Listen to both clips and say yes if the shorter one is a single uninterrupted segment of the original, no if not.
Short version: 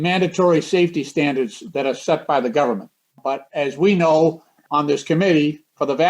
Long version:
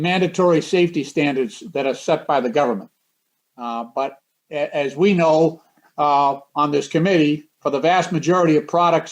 no